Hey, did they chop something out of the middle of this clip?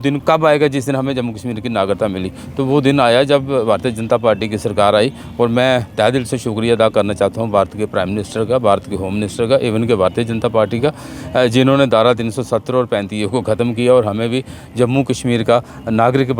no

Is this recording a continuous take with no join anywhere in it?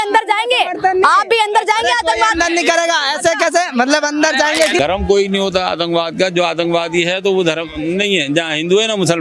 no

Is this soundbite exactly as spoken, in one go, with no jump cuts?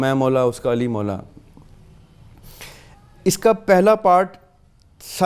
yes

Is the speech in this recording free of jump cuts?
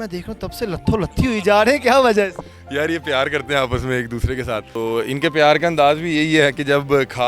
yes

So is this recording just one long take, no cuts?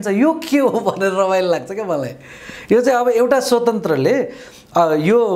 yes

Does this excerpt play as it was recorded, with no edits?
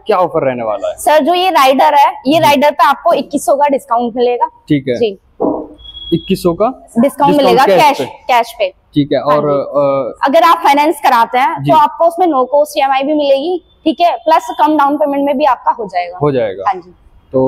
yes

